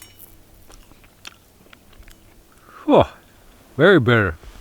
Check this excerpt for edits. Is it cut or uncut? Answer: cut